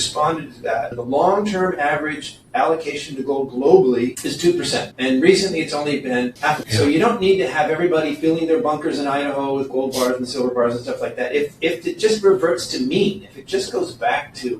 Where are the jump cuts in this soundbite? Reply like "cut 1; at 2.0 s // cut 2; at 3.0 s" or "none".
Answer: cut 1; at 0.9 s